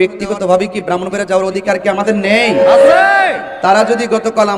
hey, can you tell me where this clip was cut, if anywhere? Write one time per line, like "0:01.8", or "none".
none